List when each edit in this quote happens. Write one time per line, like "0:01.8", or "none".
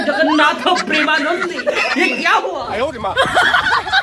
0:02.7